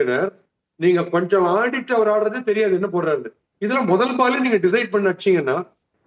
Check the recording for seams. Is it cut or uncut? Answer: uncut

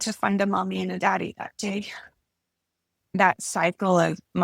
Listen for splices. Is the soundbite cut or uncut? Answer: cut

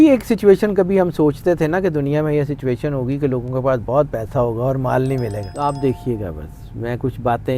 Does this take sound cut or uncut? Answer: cut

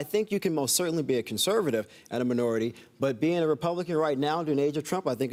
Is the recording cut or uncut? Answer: uncut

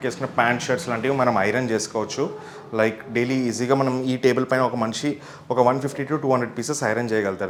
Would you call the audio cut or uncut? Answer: uncut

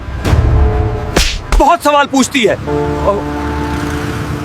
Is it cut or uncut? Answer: cut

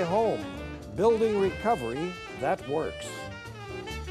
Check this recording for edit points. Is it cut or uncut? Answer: cut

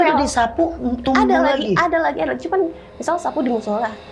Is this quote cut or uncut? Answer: uncut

